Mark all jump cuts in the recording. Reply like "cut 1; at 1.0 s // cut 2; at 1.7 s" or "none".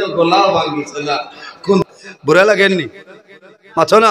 cut 1; at 1.9 s